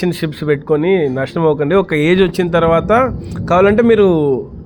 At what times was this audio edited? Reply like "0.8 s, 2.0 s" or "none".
none